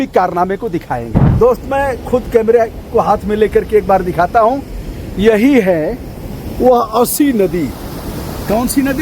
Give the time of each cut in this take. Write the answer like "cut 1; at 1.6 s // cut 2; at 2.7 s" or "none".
cut 1; at 1.2 s